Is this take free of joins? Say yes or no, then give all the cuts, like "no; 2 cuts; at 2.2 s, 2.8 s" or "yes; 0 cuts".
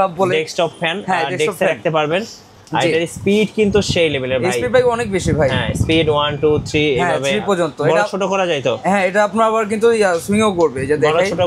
yes; 0 cuts